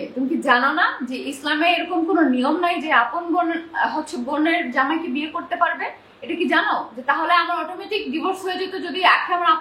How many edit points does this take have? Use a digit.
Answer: 0